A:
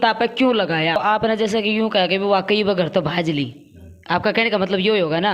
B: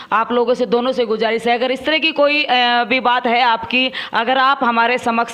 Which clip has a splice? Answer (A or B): A